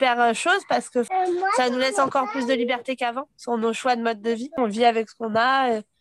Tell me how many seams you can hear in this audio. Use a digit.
2